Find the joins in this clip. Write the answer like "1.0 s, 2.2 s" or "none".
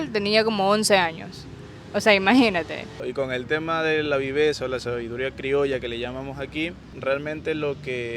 3.0 s, 6.9 s